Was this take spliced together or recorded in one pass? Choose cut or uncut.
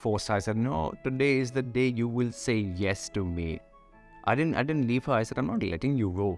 uncut